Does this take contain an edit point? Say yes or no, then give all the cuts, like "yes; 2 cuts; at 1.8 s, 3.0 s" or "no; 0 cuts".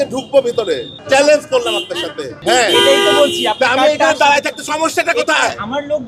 yes; 2 cuts; at 0.9 s, 2.4 s